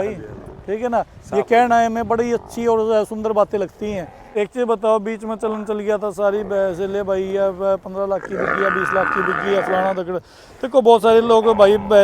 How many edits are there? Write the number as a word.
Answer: one